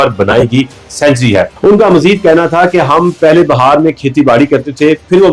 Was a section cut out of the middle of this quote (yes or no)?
yes